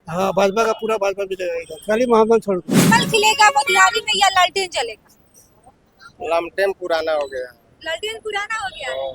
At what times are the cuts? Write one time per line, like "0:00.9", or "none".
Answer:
0:02.9